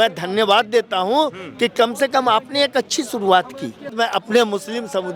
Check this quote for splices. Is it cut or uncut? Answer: cut